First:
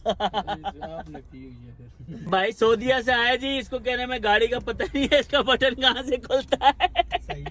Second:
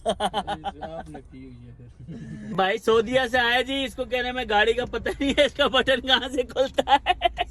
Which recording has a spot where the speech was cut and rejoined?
first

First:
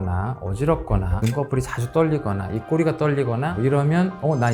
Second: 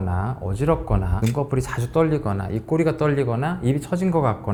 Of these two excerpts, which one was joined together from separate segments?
first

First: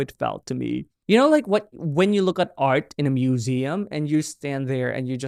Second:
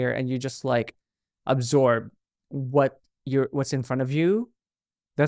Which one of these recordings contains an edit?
first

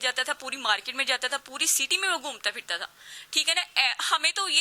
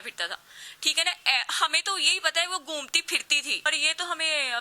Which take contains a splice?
second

